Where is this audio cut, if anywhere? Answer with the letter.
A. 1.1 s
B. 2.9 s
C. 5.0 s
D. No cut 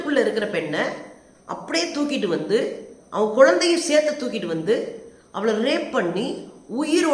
D